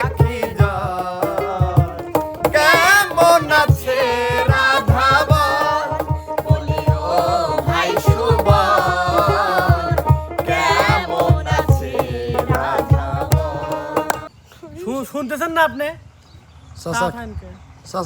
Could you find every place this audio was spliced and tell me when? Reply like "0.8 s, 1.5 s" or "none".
14.2 s